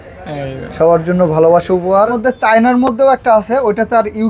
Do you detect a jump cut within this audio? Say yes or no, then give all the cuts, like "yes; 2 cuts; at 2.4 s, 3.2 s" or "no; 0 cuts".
yes; 1 cut; at 2.2 s